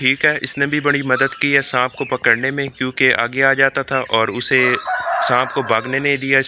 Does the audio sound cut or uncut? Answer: uncut